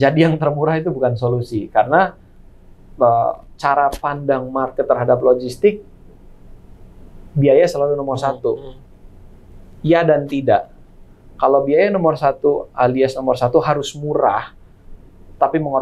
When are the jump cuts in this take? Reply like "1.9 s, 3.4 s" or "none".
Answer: none

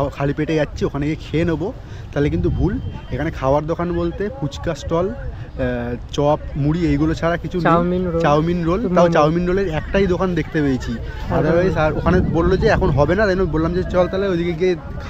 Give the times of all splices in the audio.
none

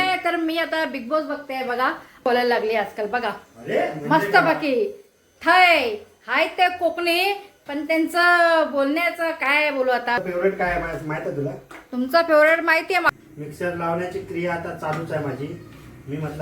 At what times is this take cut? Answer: 2.2 s, 10.2 s, 13.0 s

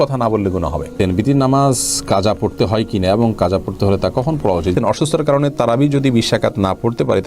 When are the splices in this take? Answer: 0.9 s, 4.7 s

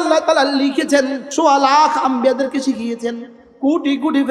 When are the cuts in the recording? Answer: 1.2 s

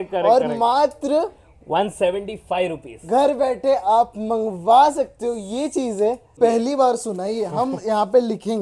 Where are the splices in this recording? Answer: 6.3 s

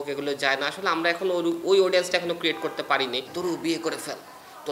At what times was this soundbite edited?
3.3 s

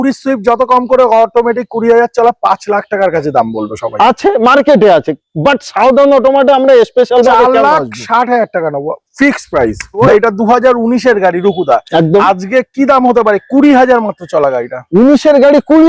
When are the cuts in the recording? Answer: 10.0 s

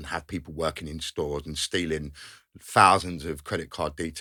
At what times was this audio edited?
none

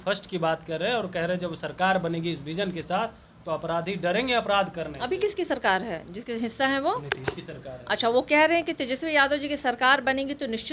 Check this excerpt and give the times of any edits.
none

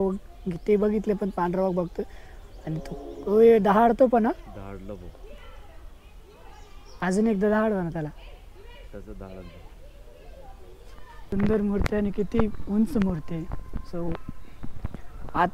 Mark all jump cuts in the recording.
11.3 s

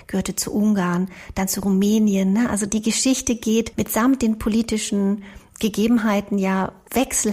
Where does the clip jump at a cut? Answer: 2.7 s, 3.7 s

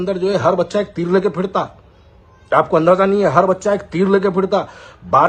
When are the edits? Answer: none

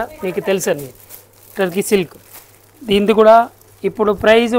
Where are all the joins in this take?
none

